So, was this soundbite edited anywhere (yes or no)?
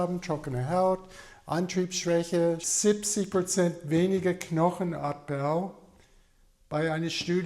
yes